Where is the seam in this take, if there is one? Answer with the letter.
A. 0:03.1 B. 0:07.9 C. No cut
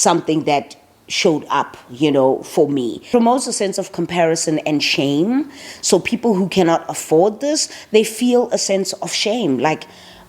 A